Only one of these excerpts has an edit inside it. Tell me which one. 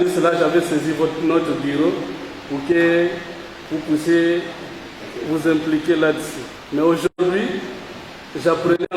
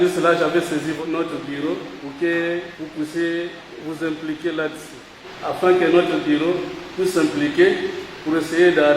second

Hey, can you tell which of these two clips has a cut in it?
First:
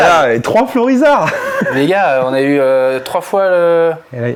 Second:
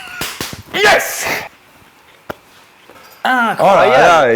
second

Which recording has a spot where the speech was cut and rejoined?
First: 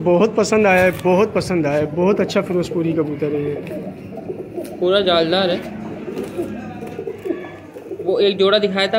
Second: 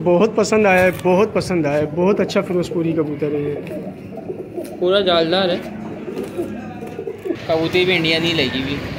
second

